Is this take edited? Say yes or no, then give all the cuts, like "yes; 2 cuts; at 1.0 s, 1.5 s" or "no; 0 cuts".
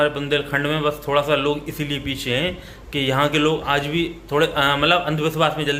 no; 0 cuts